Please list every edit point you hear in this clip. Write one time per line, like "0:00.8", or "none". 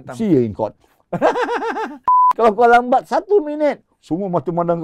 0:02.3